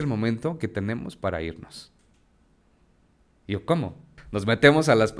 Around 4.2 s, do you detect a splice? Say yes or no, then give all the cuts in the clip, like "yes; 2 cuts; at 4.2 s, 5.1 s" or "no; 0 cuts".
yes; 1 cut; at 4.2 s